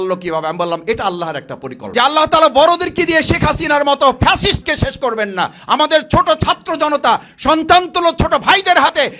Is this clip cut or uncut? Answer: cut